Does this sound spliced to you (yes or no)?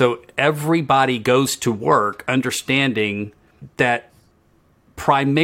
yes